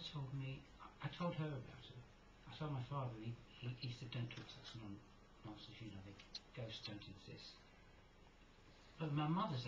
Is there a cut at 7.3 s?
yes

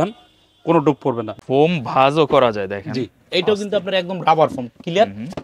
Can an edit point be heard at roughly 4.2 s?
no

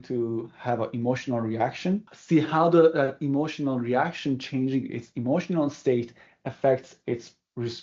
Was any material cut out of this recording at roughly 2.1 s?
yes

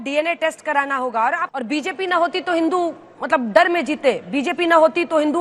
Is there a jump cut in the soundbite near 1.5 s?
yes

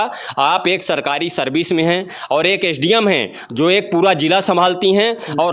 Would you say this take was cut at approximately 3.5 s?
no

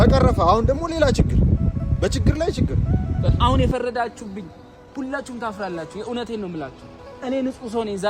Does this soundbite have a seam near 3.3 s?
yes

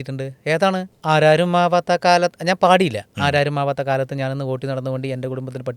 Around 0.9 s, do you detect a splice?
yes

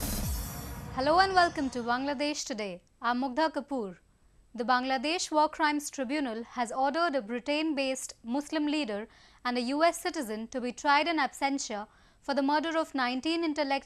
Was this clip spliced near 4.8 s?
yes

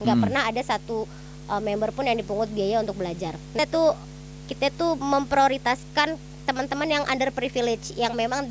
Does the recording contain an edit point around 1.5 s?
no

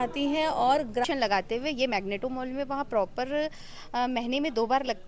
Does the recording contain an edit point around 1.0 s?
yes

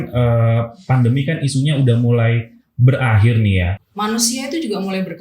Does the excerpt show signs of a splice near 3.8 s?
yes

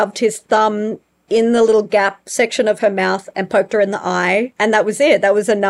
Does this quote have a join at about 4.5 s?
yes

